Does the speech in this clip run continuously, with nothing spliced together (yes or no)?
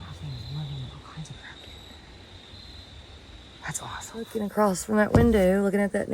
no